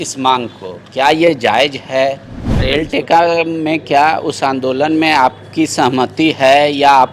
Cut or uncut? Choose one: cut